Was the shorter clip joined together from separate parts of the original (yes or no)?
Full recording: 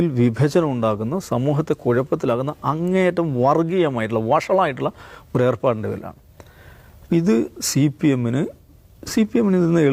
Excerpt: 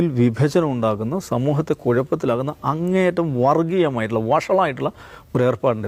no